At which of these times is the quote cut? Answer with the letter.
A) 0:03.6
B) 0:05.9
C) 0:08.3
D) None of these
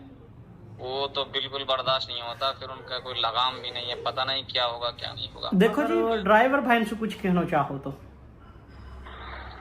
B